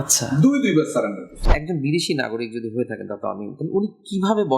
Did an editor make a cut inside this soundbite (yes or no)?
yes